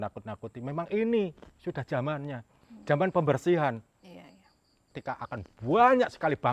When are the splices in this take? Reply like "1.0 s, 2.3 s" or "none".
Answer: 4.9 s